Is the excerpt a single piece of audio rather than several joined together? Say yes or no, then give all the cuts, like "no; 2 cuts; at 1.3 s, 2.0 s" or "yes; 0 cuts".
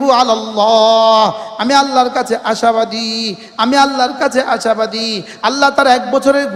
yes; 0 cuts